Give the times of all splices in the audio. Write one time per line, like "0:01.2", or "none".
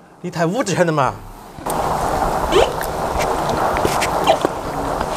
none